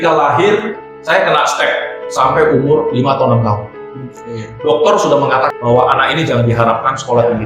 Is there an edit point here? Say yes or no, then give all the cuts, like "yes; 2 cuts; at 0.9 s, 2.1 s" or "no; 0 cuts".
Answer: yes; 1 cut; at 5.5 s